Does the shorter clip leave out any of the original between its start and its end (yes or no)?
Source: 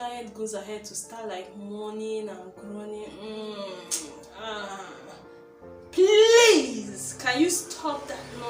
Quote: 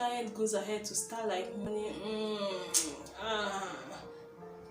yes